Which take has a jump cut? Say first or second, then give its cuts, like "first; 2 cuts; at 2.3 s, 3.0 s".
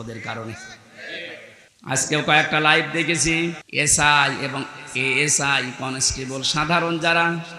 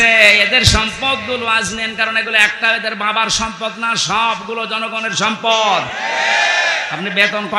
first; 2 cuts; at 1.6 s, 3.6 s